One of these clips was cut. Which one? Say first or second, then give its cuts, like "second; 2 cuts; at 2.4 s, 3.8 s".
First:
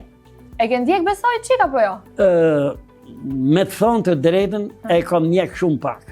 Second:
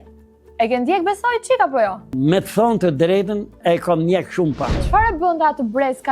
second; 2 cuts; at 2.0 s, 4.9 s